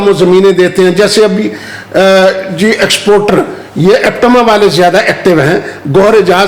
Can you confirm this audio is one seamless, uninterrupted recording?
yes; 0 cuts

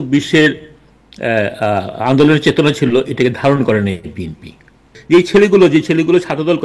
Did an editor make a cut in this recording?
yes; 1 cut; at 4.9 s

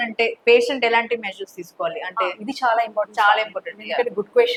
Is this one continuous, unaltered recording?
yes; 0 cuts

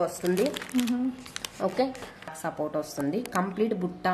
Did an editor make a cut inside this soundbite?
yes; 1 cut; at 2.3 s

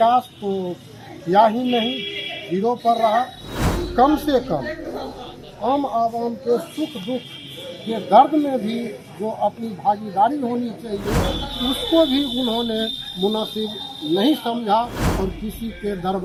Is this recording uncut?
yes; 0 cuts

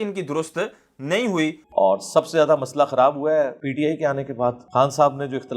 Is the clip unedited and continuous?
no; 1 cut; at 1.6 s

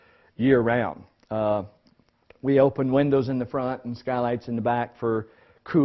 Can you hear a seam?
yes; 1 cut; at 3.4 s

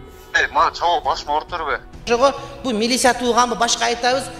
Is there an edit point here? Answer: yes; 1 cut; at 2.0 s

